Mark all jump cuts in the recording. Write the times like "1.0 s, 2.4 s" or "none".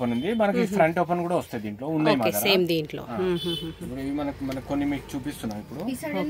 none